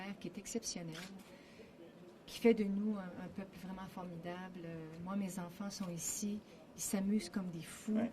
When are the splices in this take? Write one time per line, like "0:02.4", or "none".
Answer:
0:03.8